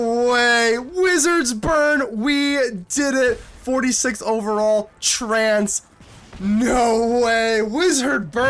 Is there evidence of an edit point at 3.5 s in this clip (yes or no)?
no